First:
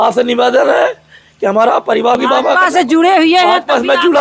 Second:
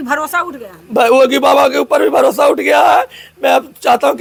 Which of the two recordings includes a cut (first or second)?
first